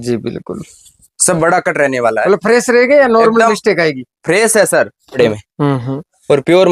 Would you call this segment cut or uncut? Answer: cut